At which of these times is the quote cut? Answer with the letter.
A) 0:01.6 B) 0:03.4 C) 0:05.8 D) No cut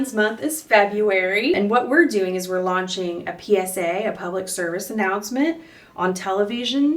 A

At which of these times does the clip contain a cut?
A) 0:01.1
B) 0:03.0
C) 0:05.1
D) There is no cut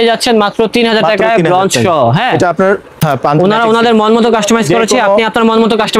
B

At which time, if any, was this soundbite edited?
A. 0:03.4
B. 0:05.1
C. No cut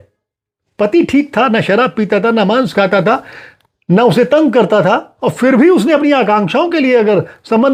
C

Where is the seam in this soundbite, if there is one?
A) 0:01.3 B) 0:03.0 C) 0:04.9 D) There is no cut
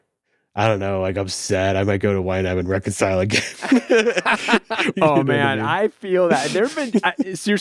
C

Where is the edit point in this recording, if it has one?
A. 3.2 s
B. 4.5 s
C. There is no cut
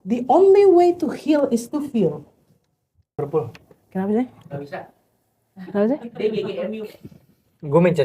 A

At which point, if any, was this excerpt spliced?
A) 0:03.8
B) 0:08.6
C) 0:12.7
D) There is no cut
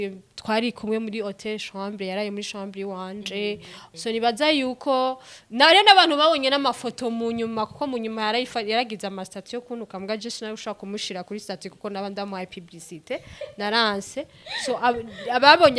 A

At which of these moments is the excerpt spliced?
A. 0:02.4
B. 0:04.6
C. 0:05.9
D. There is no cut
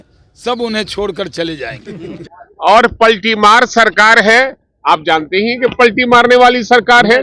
A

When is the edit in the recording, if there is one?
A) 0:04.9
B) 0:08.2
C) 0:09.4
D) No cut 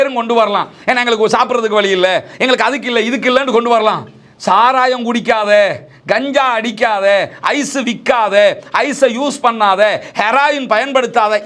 D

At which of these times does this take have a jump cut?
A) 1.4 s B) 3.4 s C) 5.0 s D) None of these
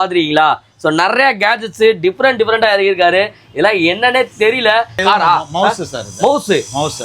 C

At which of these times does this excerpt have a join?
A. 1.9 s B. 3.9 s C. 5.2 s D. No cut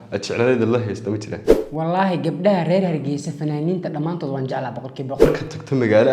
C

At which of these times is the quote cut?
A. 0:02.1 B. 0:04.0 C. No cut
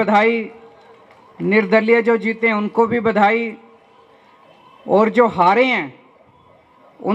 C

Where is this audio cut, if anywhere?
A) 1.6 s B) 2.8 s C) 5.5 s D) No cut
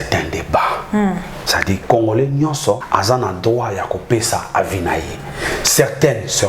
B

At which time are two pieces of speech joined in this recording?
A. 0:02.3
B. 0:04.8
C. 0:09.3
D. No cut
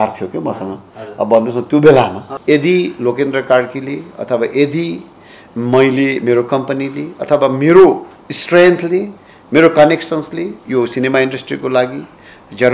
A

